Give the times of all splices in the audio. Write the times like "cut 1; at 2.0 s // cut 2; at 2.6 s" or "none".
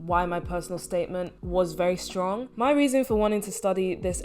cut 1; at 2.5 s